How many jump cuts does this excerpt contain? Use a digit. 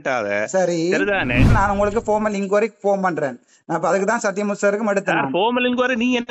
1